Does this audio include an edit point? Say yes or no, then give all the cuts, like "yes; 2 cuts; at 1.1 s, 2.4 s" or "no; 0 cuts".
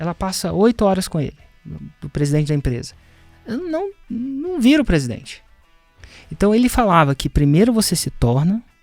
no; 0 cuts